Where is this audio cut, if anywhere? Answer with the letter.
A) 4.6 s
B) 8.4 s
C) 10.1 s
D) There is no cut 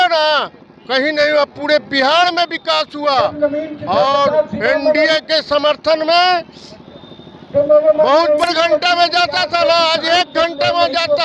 B